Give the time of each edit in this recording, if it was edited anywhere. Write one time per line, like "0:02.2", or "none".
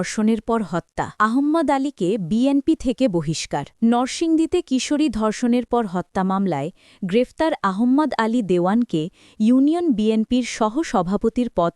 0:01.0
0:03.7